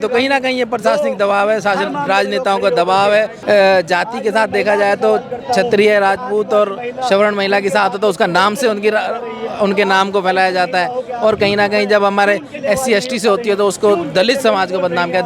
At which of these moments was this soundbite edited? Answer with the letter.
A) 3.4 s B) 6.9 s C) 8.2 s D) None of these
A